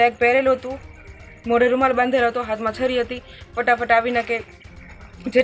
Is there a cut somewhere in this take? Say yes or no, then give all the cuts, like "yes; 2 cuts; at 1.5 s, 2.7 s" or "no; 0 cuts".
no; 0 cuts